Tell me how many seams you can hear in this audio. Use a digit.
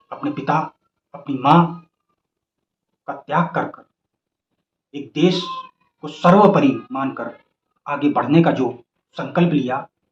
0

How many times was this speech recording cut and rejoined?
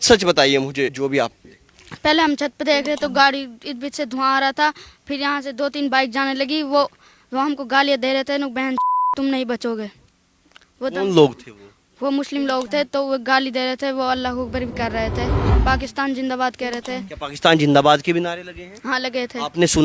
2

